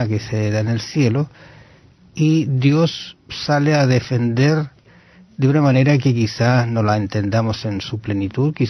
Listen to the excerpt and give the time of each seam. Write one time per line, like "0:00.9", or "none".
0:07.5